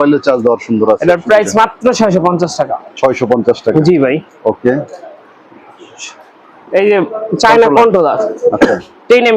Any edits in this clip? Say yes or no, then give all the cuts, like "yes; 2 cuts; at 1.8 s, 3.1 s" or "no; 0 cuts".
no; 0 cuts